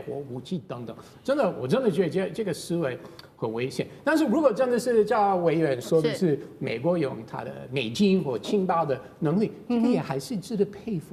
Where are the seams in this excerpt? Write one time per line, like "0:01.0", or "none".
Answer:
none